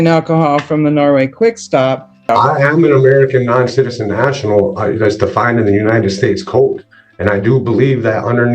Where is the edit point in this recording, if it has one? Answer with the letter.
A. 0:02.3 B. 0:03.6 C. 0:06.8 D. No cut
A